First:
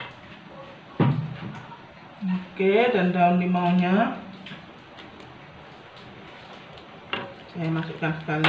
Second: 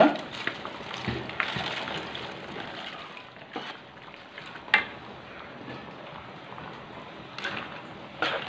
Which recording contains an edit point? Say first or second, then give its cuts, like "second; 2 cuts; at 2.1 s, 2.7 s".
second; 1 cut; at 3.3 s